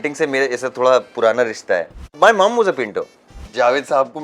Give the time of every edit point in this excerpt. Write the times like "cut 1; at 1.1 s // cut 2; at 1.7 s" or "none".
cut 1; at 2.0 s // cut 2; at 3.4 s